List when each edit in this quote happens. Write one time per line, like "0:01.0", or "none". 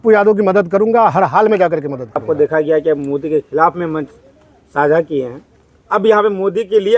0:02.2

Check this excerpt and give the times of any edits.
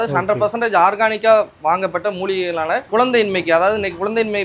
0:02.9

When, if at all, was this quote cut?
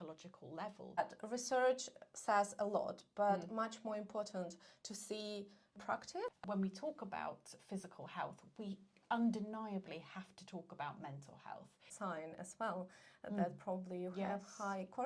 0:01.0
0:05.8
0:11.8

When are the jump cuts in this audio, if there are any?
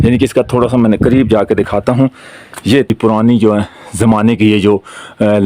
0:02.9

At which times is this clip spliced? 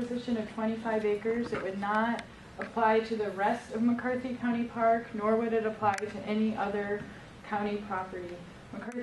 none

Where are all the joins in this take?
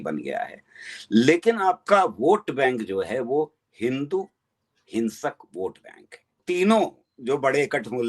0:06.4

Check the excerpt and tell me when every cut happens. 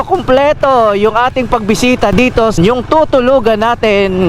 0:02.6

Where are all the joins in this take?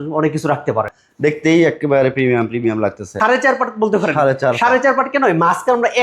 0:01.0
0:03.1

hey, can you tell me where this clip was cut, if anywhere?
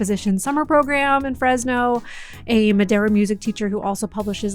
none

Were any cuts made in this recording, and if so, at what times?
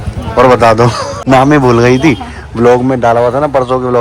0:01.1

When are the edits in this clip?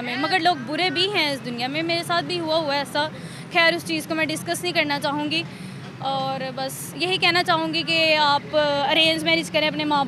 none

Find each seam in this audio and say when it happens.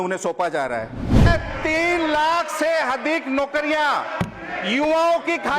0:01.3

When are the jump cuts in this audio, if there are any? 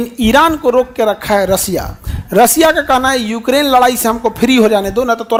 none

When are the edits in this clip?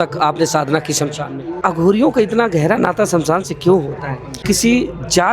0:01.6
0:04.4

